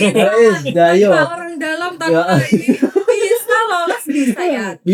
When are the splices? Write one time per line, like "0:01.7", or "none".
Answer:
none